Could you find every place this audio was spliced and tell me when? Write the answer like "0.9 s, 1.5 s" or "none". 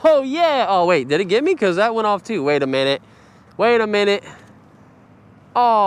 none